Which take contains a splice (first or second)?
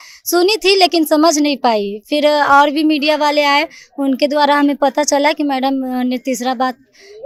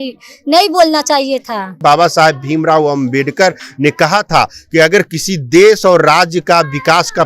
second